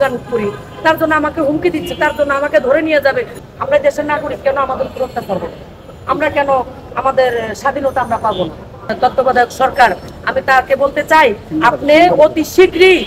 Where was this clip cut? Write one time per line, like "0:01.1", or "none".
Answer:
0:03.4
0:08.9